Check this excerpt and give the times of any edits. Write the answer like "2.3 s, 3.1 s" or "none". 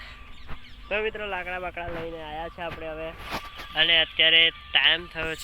none